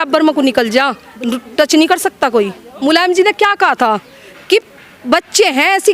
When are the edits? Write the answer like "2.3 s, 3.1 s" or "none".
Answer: 2.7 s